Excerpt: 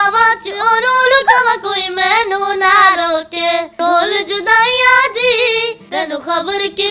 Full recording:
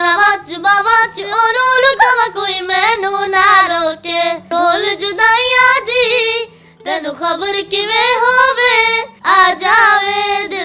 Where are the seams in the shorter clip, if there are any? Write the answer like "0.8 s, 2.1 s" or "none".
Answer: 5.8 s